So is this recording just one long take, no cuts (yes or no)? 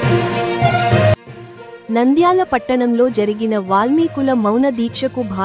no